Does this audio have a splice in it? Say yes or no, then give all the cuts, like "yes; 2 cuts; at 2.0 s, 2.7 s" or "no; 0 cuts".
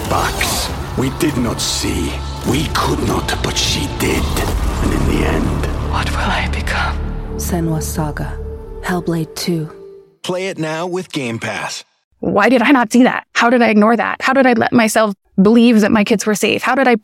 yes; 3 cuts; at 12.1 s, 13.3 s, 15.2 s